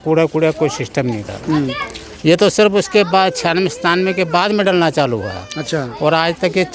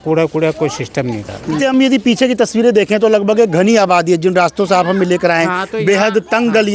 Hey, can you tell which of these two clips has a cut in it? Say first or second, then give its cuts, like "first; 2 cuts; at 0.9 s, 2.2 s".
second; 1 cut; at 1.6 s